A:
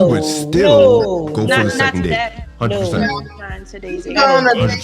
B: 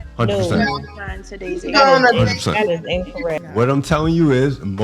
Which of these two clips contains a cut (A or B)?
B